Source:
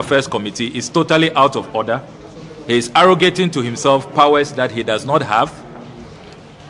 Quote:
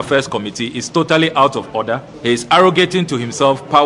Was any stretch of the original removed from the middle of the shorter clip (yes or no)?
yes